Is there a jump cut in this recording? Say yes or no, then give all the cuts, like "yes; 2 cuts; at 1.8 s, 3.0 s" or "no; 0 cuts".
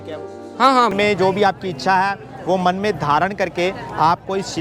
yes; 1 cut; at 0.9 s